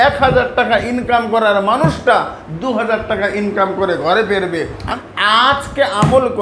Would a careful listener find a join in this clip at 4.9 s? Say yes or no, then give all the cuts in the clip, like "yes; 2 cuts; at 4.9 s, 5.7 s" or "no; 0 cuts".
yes; 1 cut; at 4.9 s